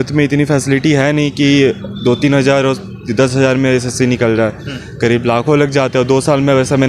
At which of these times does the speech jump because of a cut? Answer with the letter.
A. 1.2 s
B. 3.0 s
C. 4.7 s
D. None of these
D